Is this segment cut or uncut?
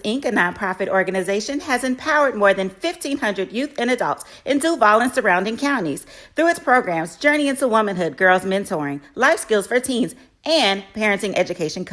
cut